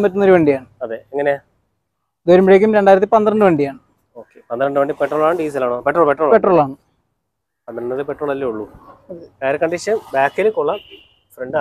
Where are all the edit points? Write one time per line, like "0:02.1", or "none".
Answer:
none